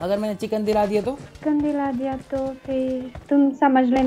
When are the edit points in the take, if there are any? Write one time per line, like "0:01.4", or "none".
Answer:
0:01.3
0:03.2